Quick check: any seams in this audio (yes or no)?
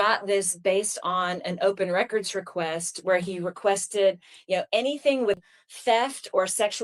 yes